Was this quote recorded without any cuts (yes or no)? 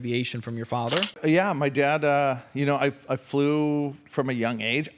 no